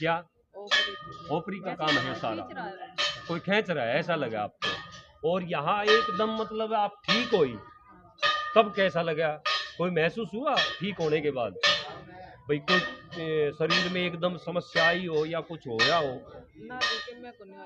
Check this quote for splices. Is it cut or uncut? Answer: uncut